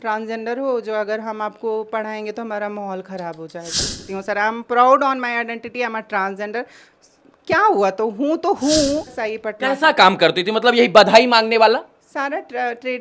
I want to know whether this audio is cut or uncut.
cut